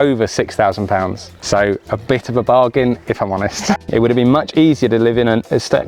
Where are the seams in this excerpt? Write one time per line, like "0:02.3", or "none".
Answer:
0:01.3
0:03.8

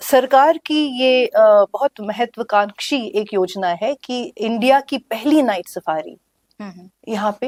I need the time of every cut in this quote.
none

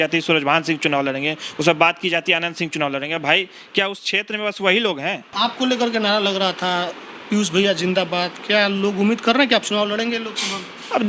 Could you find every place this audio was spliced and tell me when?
0:05.2

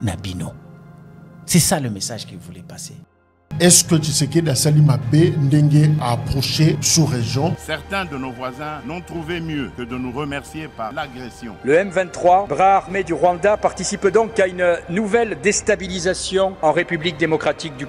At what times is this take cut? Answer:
0:03.4

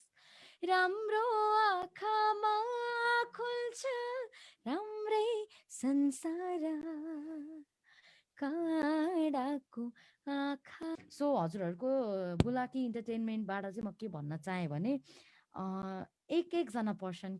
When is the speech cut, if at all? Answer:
0:11.0

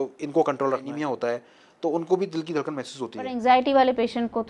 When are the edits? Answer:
0:00.9
0:03.3

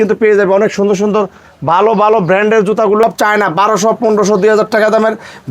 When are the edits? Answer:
0:03.0

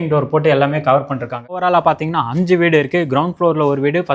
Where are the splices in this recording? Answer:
0:01.6

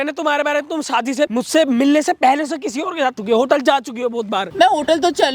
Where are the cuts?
0:01.3
0:03.2
0:04.5

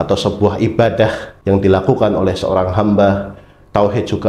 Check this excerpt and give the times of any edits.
0:01.3

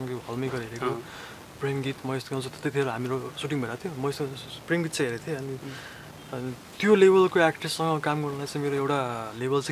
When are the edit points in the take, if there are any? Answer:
none

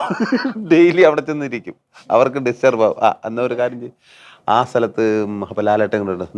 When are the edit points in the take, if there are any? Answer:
none

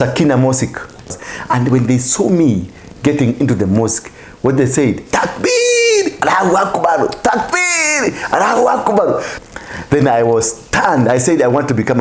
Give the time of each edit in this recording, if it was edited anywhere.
0:01.3
0:09.3

